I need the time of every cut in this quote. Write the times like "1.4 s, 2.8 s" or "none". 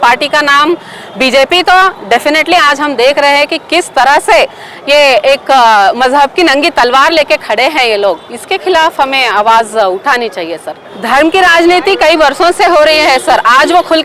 10.8 s

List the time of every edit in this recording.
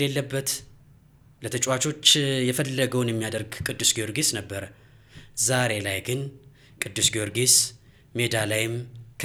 none

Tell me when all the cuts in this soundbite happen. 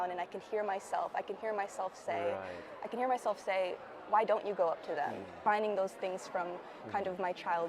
5.3 s

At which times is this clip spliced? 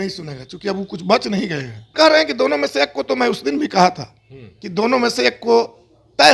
1.9 s

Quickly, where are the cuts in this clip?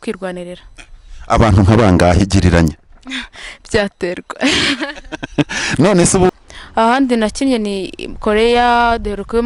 6.3 s

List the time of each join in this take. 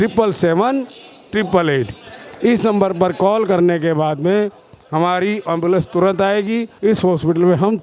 6.7 s

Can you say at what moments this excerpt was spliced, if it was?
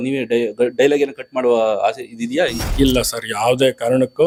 none

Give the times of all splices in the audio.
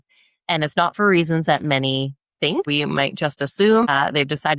2.7 s, 3.9 s

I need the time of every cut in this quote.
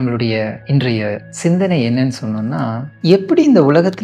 0.9 s, 2.9 s

